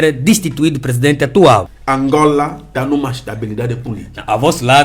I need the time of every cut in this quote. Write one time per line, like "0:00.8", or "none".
0:01.8
0:02.7